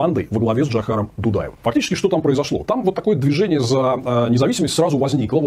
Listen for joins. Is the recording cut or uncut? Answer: uncut